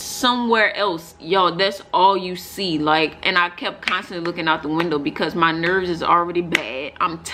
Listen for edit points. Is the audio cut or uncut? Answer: uncut